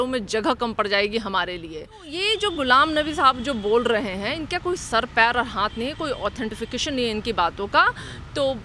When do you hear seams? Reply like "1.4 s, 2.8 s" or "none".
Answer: 2.1 s